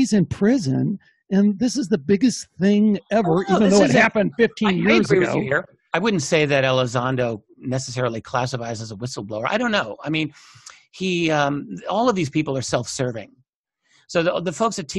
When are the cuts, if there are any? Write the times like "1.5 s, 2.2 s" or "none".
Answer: none

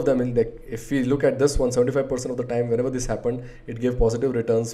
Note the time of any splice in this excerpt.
none

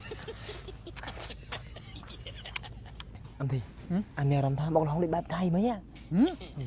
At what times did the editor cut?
3.2 s

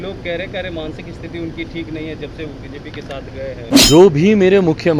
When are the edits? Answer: 3.8 s

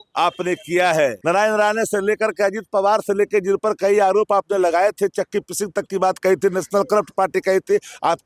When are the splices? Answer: 1.2 s

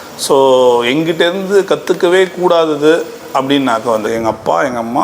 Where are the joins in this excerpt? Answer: 4.1 s

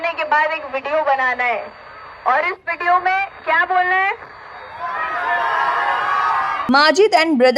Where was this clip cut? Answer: 6.6 s

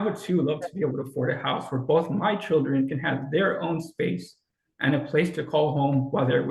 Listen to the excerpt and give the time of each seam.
none

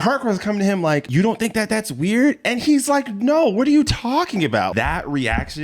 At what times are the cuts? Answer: 1.1 s, 4.7 s

